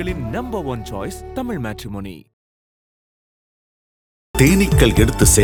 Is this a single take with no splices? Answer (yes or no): yes